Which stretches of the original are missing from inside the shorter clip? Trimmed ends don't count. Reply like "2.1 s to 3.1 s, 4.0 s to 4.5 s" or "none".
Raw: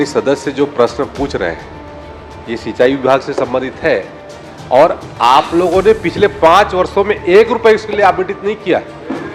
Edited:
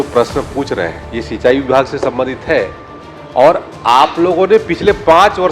1.7 s to 2.4 s